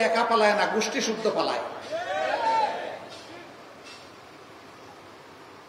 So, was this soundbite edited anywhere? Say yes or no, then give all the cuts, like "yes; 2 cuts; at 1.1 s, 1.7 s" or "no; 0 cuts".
no; 0 cuts